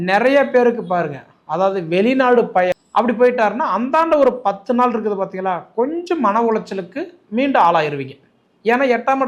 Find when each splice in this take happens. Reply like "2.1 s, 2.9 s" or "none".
2.8 s